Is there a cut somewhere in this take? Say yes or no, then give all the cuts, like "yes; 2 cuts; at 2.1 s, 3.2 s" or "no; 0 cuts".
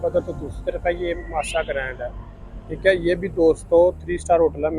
no; 0 cuts